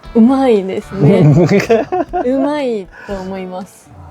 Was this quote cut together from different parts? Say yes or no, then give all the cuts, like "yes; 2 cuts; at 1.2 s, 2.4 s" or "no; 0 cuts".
no; 0 cuts